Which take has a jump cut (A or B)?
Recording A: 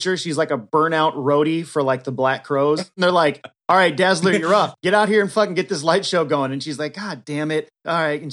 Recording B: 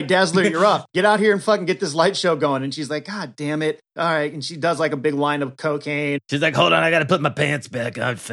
A